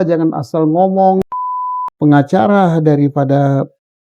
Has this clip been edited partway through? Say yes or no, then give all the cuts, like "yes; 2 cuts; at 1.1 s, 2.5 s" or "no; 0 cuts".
yes; 1 cut; at 1.3 s